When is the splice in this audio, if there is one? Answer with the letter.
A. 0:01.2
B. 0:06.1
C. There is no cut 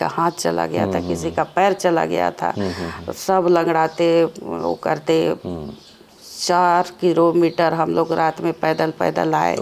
C